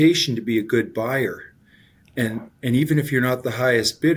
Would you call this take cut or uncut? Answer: uncut